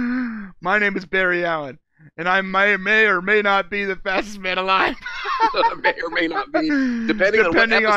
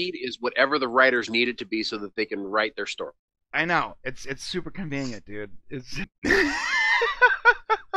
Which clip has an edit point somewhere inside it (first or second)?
second